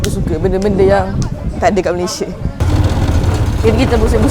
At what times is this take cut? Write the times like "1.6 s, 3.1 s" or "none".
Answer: 2.5 s